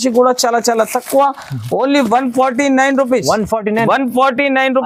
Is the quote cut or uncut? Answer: uncut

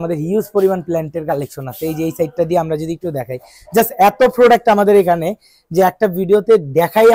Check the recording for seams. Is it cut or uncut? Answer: uncut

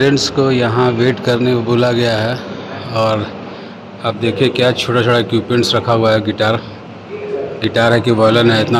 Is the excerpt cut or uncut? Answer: uncut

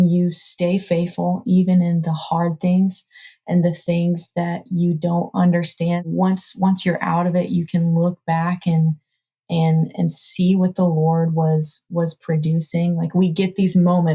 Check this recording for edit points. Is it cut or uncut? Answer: cut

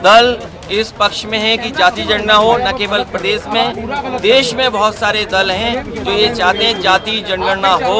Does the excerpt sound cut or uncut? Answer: uncut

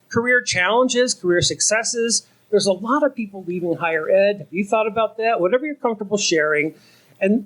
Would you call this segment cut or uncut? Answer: uncut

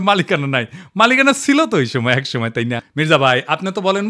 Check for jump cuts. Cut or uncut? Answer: cut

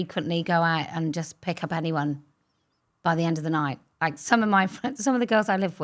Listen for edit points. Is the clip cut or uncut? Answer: uncut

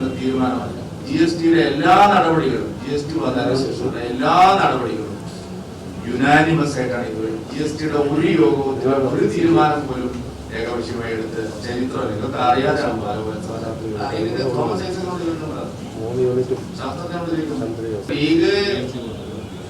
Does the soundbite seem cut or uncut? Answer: cut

